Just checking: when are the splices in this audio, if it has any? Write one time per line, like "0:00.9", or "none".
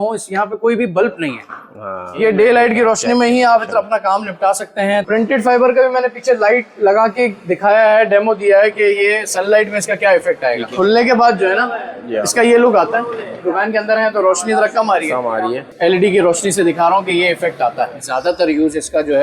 0:02.1
0:05.0
0:10.7
0:13.4
0:15.6
0:18.0